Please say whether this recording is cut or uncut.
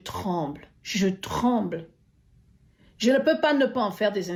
uncut